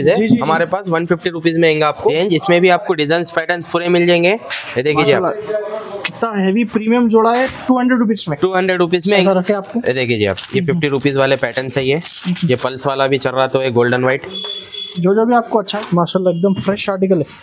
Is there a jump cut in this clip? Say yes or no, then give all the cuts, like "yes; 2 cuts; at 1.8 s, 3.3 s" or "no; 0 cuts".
yes; 3 cuts; at 2.1 s, 9.2 s, 15.7 s